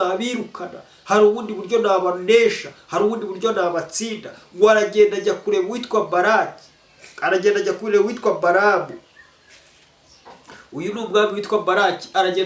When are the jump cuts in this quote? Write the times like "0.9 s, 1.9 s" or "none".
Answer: none